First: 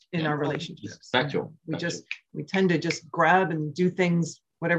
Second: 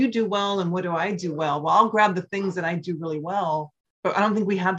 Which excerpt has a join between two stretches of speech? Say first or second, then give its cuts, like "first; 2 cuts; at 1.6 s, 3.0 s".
second; 1 cut; at 3.8 s